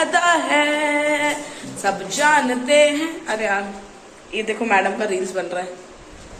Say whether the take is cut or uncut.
uncut